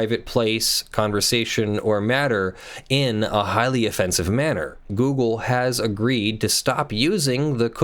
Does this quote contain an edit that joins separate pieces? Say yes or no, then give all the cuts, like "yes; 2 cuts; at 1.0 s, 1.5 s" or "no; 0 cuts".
yes; 1 cut; at 4.9 s